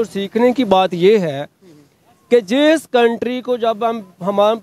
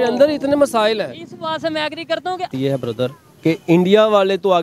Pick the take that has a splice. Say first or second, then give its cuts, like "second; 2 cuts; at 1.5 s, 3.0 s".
second; 1 cut; at 2.5 s